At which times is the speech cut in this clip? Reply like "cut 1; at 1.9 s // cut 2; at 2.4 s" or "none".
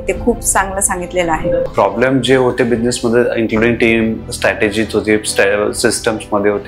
none

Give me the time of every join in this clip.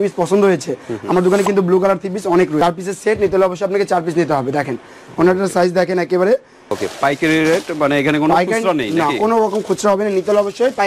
cut 1; at 2.6 s // cut 2; at 6.8 s

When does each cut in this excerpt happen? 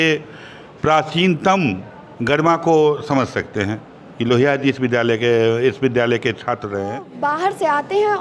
cut 1; at 7.1 s

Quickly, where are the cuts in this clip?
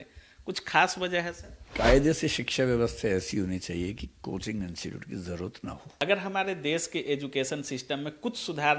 cut 1; at 1.5 s // cut 2; at 6.0 s

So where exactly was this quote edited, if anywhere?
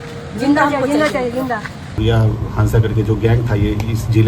cut 1; at 1.9 s

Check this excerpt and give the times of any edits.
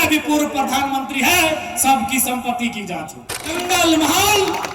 cut 1; at 3.5 s

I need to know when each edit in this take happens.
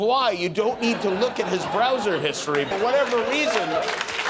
cut 1; at 2.7 s

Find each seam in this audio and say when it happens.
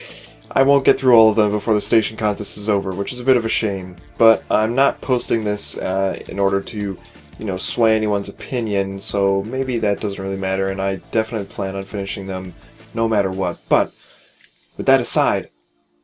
cut 1; at 10.0 s

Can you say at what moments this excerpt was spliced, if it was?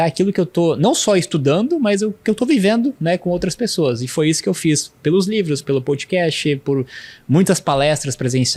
none

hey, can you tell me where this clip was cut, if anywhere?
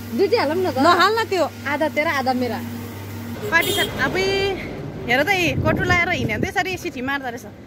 cut 1; at 3.2 s

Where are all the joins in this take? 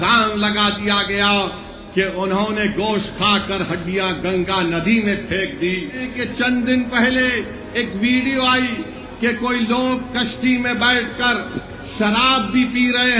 cut 1; at 6.2 s

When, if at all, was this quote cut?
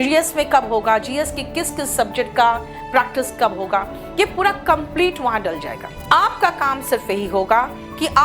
cut 1; at 5.9 s

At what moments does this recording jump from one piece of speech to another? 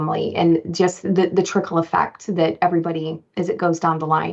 cut 1; at 3.2 s

